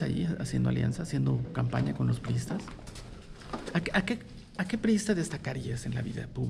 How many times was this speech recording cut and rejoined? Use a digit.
0